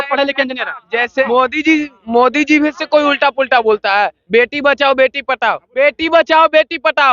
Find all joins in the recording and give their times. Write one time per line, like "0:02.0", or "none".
0:01.2
0:05.7